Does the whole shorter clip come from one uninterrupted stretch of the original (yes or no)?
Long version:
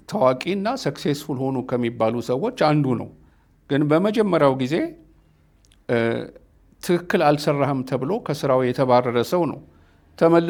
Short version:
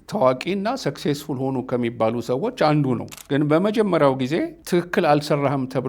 no